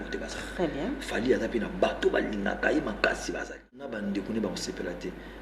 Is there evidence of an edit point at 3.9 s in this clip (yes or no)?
yes